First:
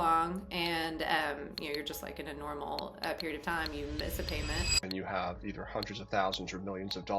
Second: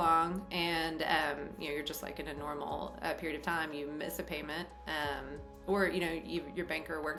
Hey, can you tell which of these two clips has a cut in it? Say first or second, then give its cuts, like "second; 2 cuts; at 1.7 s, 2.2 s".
first; 1 cut; at 4.8 s